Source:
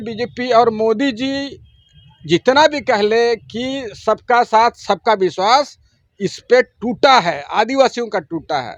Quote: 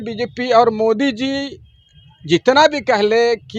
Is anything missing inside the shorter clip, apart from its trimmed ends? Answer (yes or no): no